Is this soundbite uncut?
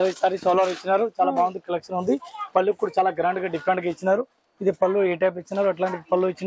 yes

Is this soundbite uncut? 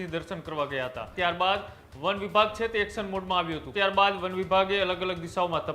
no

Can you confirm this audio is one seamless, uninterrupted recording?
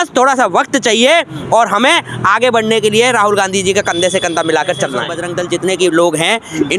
no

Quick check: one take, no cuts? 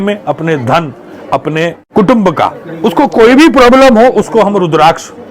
yes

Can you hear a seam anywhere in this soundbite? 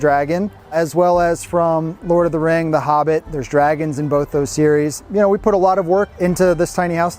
yes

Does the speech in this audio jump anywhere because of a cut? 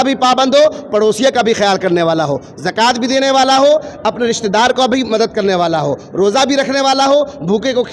no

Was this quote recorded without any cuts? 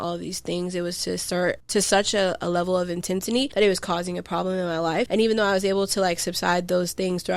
no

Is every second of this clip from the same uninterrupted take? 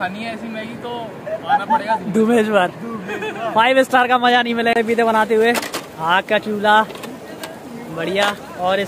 no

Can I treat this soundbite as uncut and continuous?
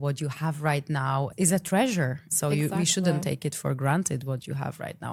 yes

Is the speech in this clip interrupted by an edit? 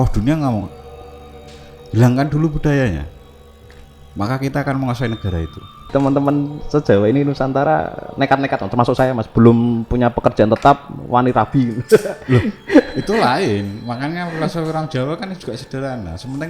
yes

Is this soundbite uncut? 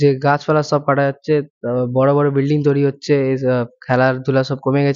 yes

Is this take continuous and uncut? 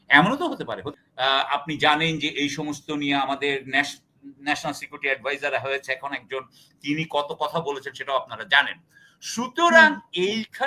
no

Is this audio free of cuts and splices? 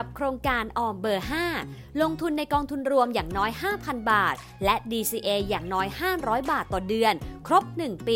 yes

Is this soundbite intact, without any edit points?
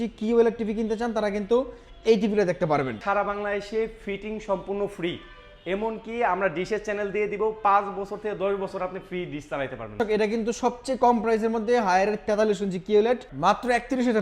no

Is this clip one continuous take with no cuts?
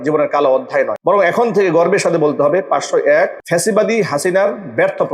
no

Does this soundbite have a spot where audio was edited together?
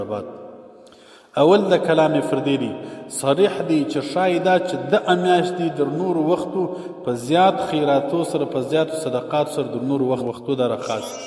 yes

